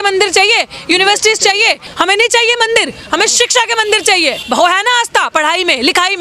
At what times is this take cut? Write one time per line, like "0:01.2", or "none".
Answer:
0:01.8
0:04.4